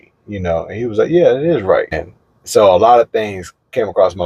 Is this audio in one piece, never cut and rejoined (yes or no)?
no